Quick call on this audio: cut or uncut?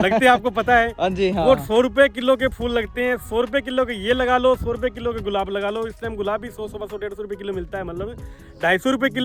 uncut